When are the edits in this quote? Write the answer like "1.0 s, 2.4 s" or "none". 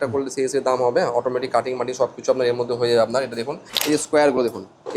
3.7 s